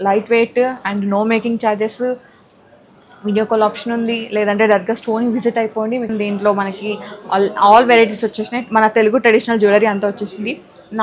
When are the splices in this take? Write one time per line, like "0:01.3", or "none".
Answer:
0:06.1